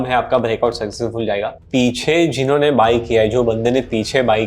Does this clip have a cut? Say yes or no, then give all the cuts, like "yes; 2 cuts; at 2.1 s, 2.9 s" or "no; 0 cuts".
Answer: yes; 1 cut; at 1.5 s